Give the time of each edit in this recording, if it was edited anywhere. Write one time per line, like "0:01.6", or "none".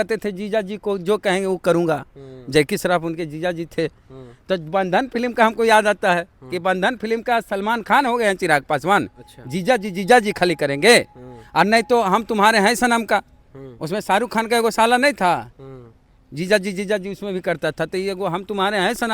none